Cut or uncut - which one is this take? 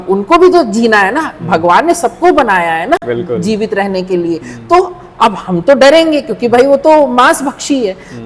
uncut